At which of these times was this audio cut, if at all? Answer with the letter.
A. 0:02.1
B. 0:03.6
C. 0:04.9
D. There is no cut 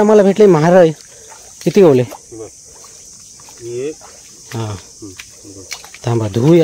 D